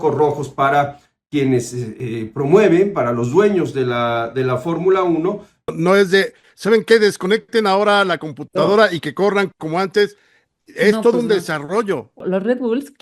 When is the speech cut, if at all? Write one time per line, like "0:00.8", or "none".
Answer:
0:05.7
0:12.2